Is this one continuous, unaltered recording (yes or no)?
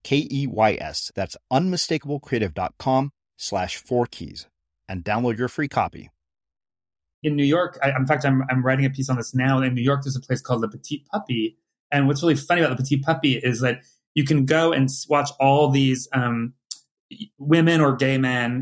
no